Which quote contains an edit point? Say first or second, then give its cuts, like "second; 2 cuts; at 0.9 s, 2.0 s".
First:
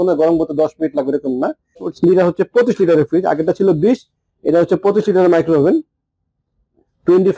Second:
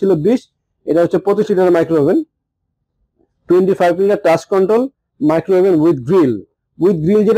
first; 1 cut; at 1.9 s